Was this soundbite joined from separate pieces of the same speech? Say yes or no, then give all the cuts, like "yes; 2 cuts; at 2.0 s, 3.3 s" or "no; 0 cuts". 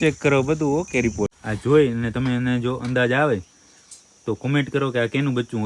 yes; 1 cut; at 1.3 s